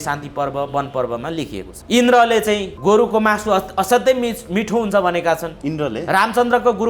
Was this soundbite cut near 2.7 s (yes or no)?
yes